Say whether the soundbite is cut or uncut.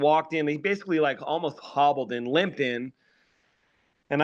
uncut